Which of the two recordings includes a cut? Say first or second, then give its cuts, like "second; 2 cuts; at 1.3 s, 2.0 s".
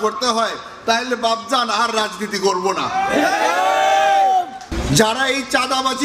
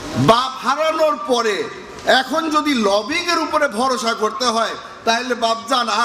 first; 1 cut; at 4.6 s